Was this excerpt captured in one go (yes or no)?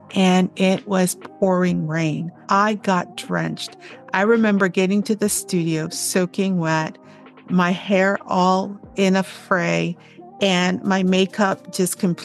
no